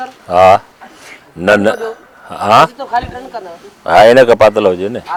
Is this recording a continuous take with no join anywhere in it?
yes; 0 cuts

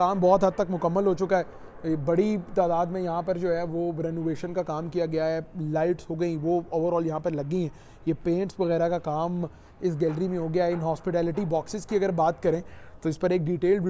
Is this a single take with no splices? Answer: yes; 0 cuts

